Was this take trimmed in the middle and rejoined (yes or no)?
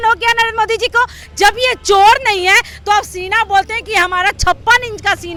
no